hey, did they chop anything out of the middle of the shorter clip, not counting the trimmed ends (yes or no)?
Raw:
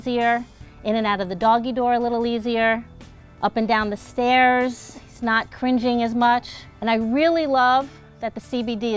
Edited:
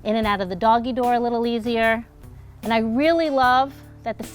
yes